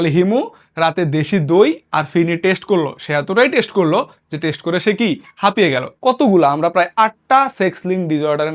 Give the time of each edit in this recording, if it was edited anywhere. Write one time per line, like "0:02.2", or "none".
0:05.9